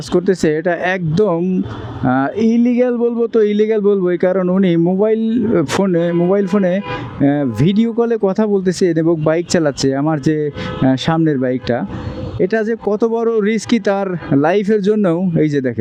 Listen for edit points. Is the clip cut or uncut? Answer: uncut